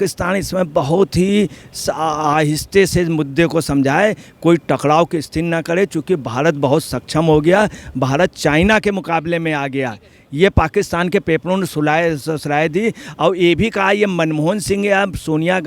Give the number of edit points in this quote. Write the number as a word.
zero